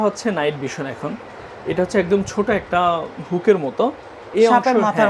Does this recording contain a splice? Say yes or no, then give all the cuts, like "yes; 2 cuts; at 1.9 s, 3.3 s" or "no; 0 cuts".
no; 0 cuts